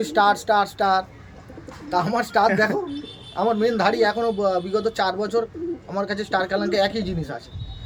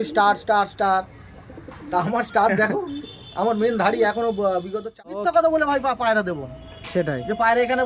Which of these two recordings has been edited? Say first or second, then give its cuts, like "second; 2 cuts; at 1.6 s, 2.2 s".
second; 1 cut; at 5.2 s